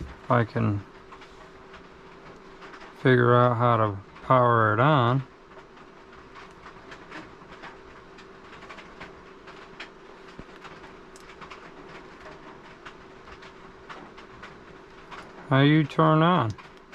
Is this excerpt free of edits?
yes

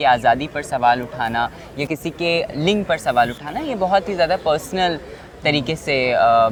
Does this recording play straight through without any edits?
yes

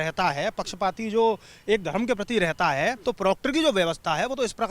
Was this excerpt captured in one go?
no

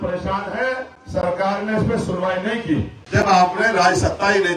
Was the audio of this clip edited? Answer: yes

